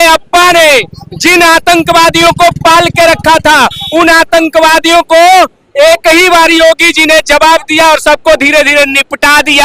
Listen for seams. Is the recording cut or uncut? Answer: uncut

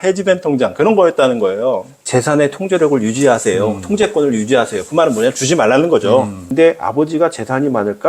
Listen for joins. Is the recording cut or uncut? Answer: cut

